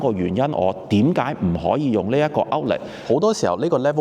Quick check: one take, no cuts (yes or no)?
no